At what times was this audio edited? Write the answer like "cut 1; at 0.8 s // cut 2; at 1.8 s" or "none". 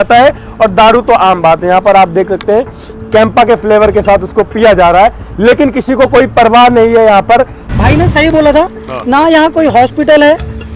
cut 1; at 7.6 s

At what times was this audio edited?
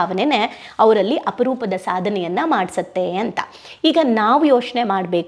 none

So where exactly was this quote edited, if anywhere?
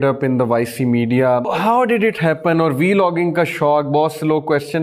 cut 1; at 1.5 s

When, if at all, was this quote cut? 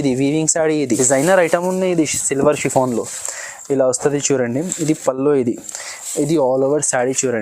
cut 1; at 1.0 s

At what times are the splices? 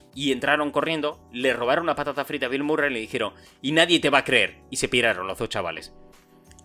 none

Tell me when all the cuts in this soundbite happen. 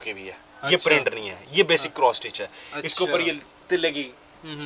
none

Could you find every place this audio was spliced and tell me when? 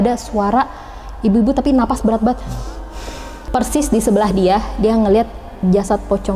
cut 1; at 3.3 s

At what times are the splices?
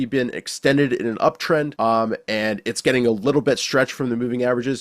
cut 1; at 1.7 s

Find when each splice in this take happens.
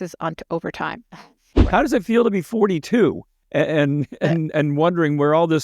cut 1; at 1.4 s

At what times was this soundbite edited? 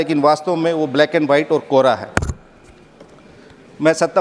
none

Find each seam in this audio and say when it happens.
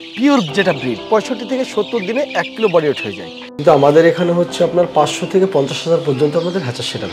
cut 1; at 1.0 s // cut 2; at 3.0 s

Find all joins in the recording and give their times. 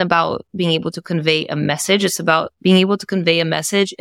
cut 1; at 2.6 s

